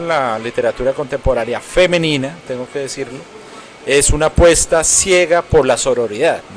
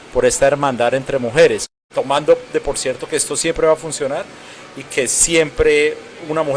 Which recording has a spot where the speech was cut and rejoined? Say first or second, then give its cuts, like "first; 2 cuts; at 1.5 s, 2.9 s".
second; 1 cut; at 1.8 s